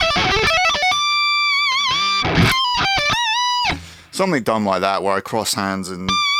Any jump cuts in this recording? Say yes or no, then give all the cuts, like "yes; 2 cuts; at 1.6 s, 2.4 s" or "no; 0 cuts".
no; 0 cuts